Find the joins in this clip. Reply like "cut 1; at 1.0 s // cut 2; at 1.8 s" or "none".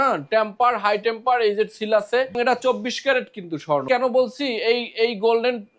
cut 1; at 2.3 s // cut 2; at 3.9 s